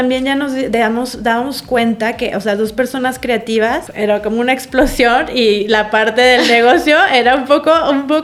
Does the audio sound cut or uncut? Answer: uncut